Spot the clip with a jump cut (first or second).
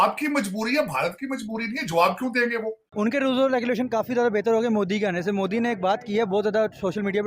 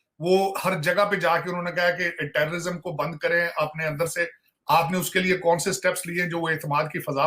first